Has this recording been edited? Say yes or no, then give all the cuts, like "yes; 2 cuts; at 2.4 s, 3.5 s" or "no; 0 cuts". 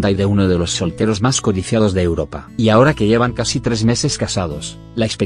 yes; 1 cut; at 3.6 s